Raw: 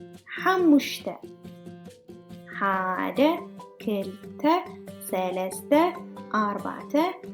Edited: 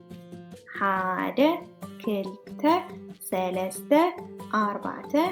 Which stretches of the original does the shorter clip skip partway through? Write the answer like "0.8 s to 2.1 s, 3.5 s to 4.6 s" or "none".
none